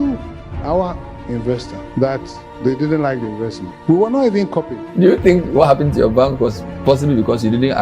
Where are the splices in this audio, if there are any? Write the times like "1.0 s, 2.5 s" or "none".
1.8 s, 3.7 s, 4.8 s